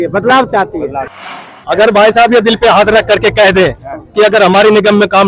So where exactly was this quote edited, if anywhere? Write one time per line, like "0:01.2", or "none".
0:01.3